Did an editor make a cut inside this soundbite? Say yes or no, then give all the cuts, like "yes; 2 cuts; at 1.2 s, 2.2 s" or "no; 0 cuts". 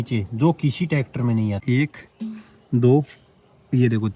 yes; 1 cut; at 1.6 s